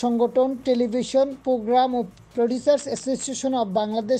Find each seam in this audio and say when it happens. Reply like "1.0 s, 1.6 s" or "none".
2.2 s